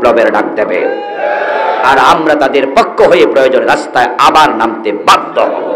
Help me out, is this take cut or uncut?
uncut